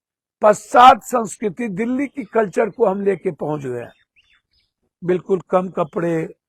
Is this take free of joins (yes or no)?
yes